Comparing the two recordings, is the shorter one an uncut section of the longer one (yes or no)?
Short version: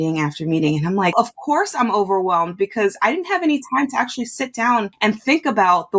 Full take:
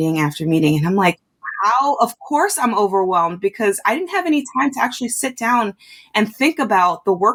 no